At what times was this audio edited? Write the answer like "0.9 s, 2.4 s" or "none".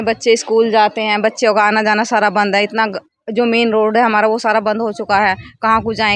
none